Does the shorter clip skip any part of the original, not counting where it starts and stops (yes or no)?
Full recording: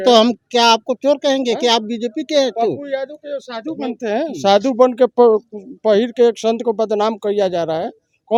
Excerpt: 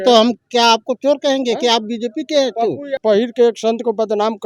yes